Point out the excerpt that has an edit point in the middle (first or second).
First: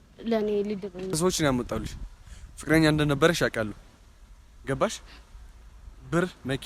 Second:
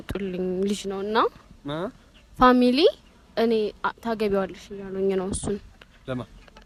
first